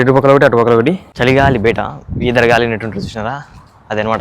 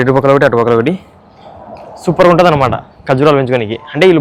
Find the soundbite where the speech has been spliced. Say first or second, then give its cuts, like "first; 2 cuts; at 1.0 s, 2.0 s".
first; 1 cut; at 1.1 s